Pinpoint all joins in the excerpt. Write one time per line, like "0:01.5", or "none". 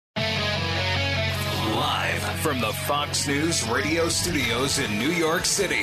0:01.2